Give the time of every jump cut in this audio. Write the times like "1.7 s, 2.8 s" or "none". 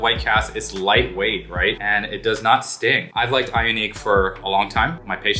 3.1 s